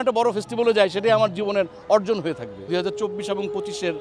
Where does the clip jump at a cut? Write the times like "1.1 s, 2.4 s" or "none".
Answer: 2.6 s

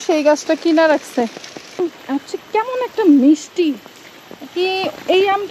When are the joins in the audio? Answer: 1.8 s

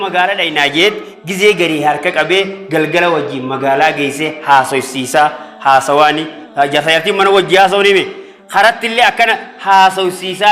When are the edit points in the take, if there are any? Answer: none

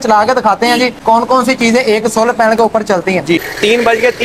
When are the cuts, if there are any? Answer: 1.0 s, 3.4 s

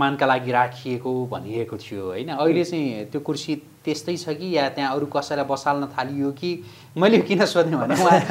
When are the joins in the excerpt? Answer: none

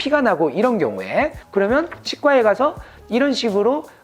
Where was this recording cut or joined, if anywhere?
2.9 s

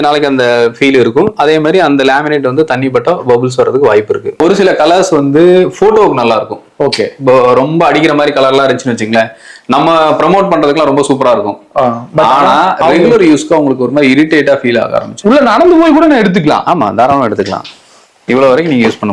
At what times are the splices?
4.4 s, 15.1 s

